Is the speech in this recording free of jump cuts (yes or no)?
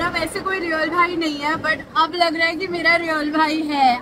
yes